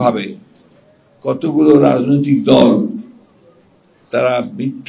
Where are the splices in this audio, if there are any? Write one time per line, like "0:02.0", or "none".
none